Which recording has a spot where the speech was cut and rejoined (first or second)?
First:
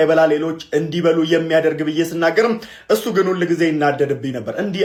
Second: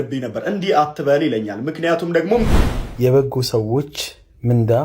second